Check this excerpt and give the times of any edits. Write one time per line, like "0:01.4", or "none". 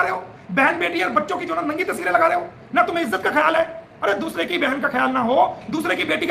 none